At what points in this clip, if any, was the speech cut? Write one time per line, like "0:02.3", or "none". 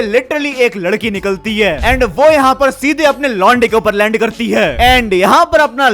none